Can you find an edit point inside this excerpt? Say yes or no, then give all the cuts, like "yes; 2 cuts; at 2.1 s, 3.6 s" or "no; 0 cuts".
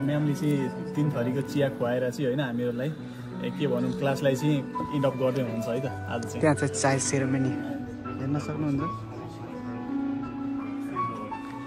no; 0 cuts